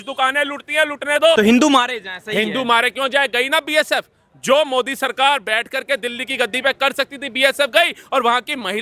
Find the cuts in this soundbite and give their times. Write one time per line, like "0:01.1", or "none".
0:01.4